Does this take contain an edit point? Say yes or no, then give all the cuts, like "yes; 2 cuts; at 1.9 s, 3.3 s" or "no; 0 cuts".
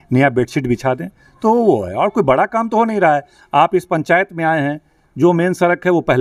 no; 0 cuts